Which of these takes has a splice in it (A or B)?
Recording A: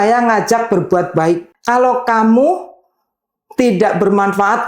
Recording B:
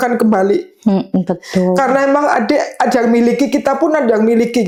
A